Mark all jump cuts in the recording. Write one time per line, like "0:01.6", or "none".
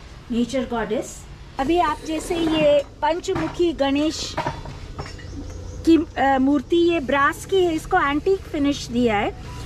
0:01.4